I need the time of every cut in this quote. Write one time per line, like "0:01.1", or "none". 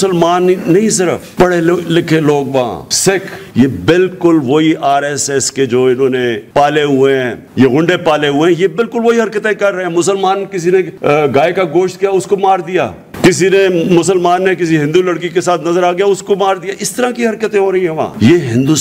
0:03.4
0:06.4
0:07.4
0:10.9

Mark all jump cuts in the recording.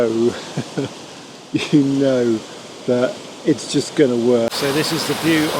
0:04.5

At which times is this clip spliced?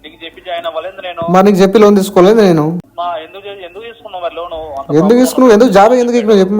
0:02.9

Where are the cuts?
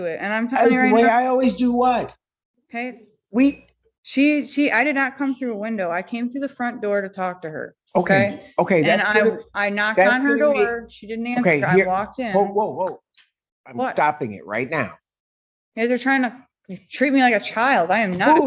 none

